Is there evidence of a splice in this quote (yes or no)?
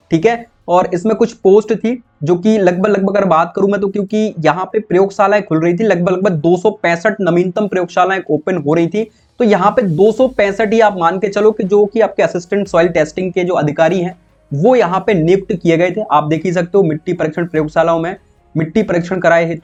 no